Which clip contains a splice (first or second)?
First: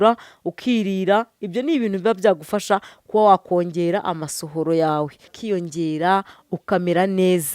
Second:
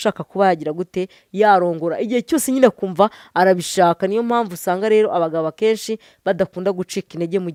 first